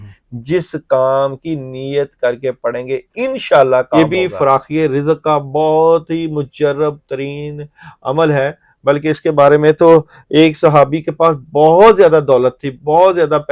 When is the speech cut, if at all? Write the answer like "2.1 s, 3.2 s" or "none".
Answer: 4.0 s